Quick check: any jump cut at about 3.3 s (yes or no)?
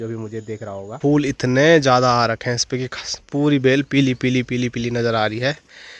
no